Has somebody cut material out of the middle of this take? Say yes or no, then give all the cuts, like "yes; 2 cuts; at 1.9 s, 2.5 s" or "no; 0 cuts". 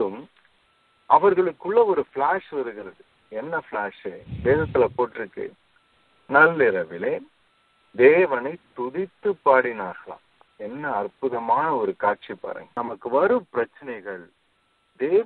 yes; 1 cut; at 12.7 s